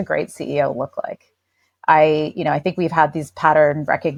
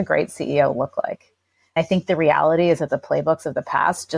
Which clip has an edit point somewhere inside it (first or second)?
second